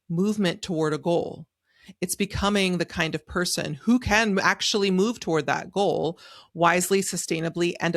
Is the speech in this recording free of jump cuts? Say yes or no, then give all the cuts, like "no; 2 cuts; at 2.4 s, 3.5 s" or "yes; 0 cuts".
yes; 0 cuts